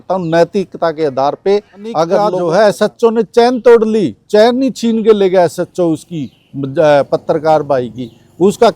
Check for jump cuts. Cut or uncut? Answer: cut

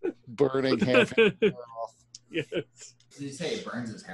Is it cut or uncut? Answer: cut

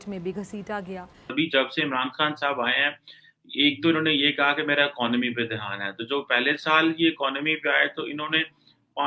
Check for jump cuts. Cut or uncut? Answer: cut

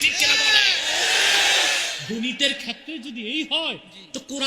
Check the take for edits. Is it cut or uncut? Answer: cut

